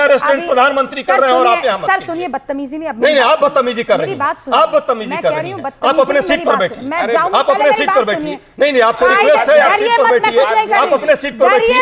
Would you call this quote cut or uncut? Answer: uncut